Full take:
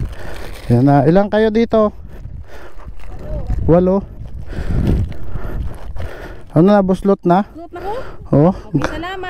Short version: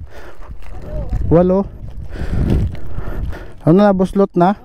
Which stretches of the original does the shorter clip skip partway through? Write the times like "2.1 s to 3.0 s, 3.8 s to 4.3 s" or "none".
5.8 s to 6.3 s